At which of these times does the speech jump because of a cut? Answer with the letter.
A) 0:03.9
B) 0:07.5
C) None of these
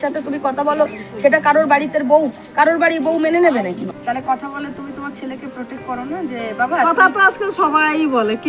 A